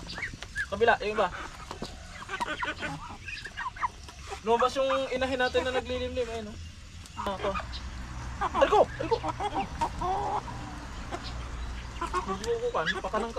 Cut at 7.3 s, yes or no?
yes